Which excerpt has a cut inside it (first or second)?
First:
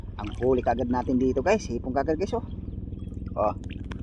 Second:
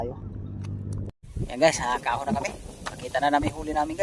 second